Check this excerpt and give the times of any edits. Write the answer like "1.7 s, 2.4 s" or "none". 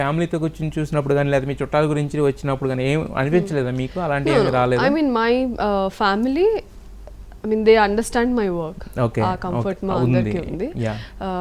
none